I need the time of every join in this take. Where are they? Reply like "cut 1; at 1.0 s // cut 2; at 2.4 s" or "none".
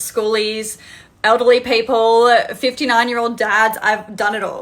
none